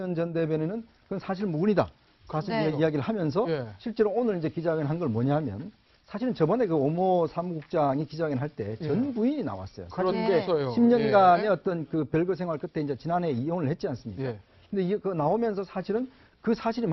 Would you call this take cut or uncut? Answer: cut